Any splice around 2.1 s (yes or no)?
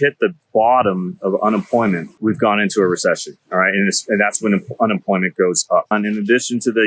yes